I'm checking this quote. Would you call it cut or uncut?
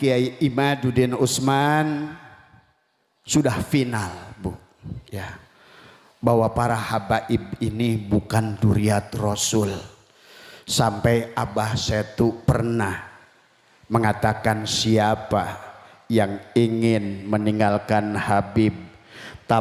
uncut